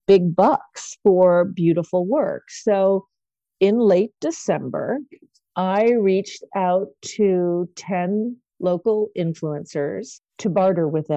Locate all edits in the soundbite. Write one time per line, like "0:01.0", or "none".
0:10.2